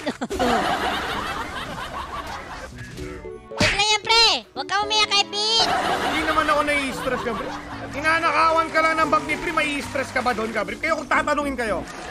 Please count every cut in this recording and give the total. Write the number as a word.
one